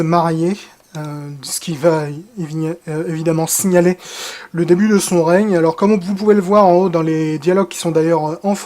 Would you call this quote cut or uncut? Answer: cut